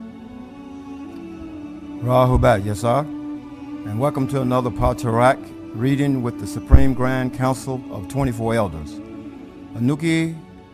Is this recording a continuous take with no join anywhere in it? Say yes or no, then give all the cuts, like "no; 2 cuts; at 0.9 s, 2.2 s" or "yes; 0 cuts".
yes; 0 cuts